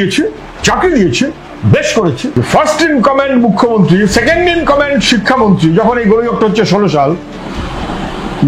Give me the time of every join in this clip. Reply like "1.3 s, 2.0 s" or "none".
2.4 s